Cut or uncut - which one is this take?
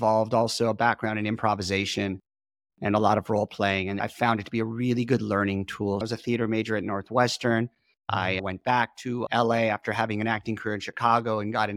cut